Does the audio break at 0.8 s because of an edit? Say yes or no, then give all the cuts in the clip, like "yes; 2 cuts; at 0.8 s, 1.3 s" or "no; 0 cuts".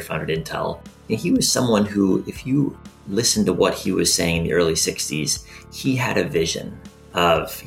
no; 0 cuts